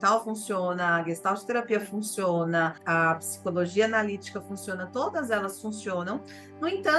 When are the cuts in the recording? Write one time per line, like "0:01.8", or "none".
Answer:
0:02.8